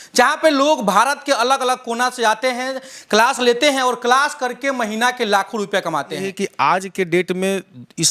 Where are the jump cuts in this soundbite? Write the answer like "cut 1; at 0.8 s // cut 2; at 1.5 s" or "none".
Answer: cut 1; at 6.4 s